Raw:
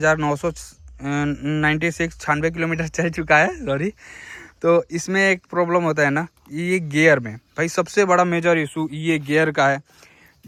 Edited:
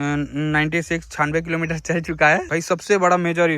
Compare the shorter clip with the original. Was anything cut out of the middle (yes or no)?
yes